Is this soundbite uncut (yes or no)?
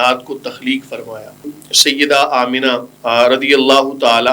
no